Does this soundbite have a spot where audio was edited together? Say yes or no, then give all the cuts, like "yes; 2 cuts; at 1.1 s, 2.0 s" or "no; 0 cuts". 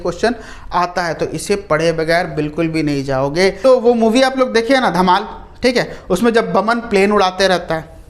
yes; 1 cut; at 3.6 s